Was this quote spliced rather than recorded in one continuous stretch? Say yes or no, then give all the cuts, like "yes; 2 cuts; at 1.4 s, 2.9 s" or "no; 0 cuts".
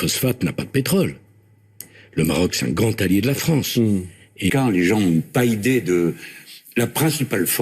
yes; 1 cut; at 4.5 s